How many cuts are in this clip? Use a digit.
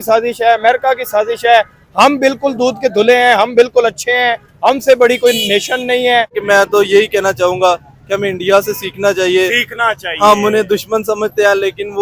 1